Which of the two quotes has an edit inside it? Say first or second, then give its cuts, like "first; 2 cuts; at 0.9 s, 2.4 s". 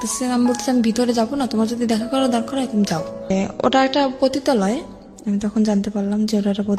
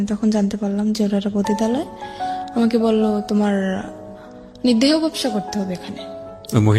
first; 1 cut; at 3.3 s